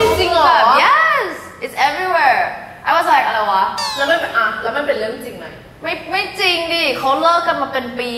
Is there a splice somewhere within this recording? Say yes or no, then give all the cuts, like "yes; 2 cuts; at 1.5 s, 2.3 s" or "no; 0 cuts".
no; 0 cuts